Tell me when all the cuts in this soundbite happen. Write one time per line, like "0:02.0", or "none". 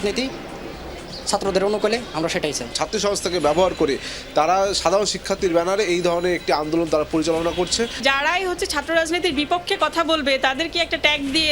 0:02.7
0:07.9